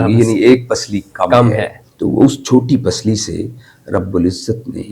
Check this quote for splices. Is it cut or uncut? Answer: cut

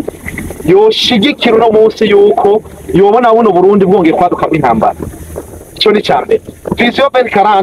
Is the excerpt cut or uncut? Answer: uncut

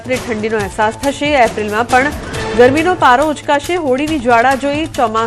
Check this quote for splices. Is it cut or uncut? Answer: uncut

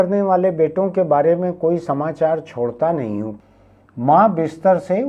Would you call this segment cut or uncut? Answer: cut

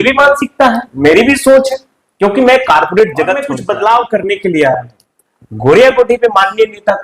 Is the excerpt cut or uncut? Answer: cut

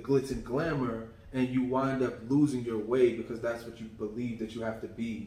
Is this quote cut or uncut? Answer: uncut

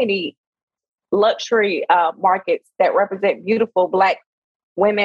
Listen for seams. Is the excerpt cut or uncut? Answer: uncut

